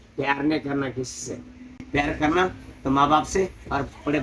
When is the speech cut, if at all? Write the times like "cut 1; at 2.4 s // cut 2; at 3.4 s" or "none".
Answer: cut 1; at 2.6 s